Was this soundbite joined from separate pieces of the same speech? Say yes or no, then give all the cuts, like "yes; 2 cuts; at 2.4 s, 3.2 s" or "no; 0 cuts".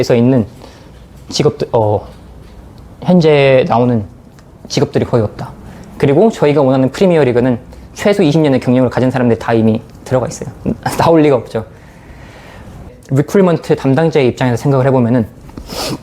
yes; 1 cut; at 12.9 s